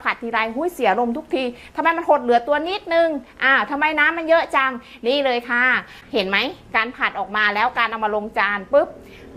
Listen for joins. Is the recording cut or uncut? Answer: cut